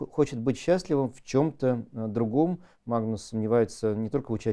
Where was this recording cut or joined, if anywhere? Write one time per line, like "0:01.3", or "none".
0:02.7